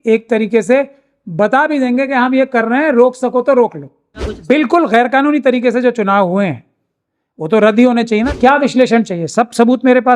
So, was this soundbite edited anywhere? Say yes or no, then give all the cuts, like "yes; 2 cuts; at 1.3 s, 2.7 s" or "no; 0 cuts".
yes; 2 cuts; at 4.2 s, 8.3 s